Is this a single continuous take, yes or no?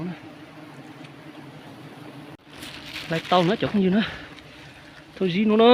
no